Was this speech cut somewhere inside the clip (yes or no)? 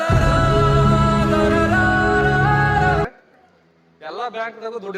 yes